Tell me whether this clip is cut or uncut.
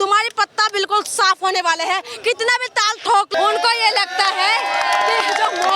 cut